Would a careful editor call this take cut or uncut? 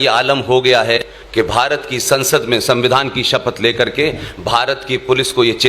cut